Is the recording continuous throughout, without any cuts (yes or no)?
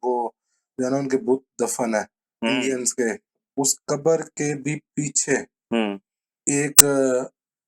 no